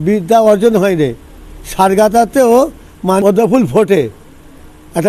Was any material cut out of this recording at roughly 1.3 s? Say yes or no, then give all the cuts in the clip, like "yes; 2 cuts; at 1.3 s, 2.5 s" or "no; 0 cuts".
no; 1 cut; at 3.2 s